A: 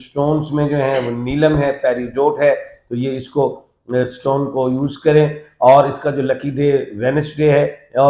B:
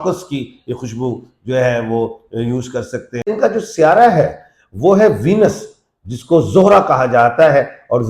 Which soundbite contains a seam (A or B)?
B